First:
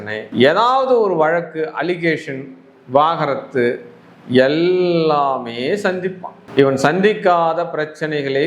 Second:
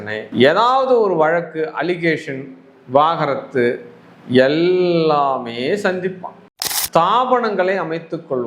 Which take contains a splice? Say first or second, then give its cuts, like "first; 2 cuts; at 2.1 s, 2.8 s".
second; 1 cut; at 6.4 s